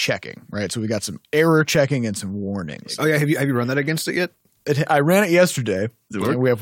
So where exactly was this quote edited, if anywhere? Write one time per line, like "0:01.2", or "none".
0:02.8